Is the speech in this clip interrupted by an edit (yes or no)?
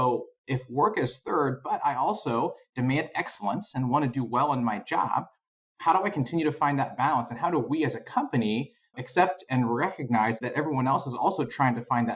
yes